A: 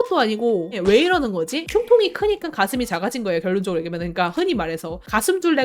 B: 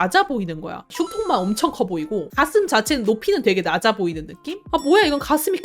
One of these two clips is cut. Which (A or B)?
A